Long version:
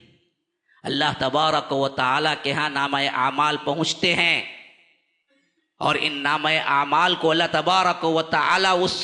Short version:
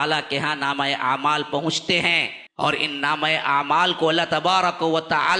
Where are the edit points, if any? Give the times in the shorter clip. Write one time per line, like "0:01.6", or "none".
0:02.4